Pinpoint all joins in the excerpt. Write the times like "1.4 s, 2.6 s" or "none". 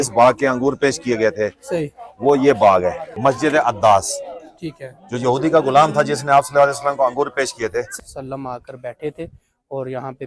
3.1 s, 7.9 s

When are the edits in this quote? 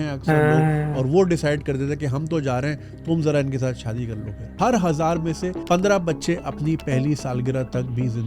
4.5 s

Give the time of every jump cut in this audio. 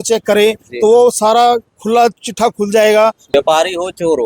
3.2 s

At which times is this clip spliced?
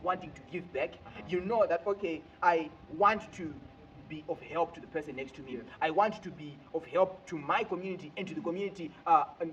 none

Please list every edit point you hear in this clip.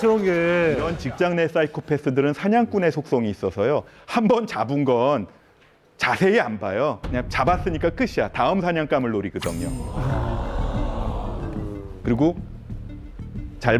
1.0 s

